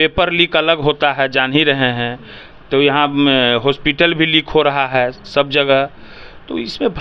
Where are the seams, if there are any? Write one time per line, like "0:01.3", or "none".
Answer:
none